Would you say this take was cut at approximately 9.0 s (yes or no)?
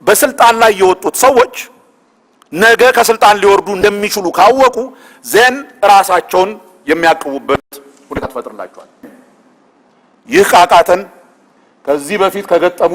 yes